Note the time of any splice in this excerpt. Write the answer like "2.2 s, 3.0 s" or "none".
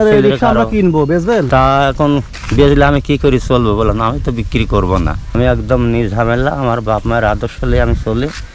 1.5 s, 5.3 s